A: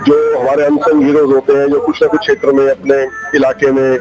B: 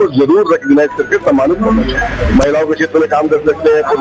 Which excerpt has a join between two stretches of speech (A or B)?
B